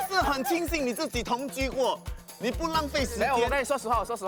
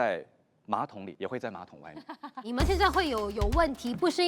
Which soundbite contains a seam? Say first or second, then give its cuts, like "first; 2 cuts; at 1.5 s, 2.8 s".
second; 2 cuts; at 1.0 s, 2.4 s